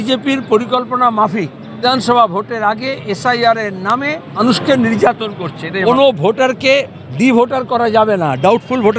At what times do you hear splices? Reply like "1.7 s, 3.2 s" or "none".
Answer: 1.8 s, 4.4 s, 5.6 s